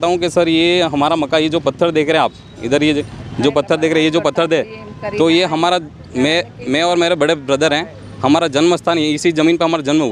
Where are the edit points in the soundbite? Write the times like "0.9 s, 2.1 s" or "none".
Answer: none